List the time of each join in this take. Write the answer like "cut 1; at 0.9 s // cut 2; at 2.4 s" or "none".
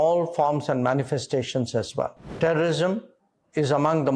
cut 1; at 2.2 s